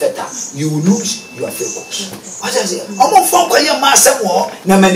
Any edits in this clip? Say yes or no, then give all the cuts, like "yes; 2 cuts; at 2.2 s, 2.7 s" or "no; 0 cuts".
yes; 1 cut; at 2.3 s